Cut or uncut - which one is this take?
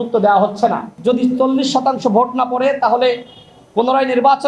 cut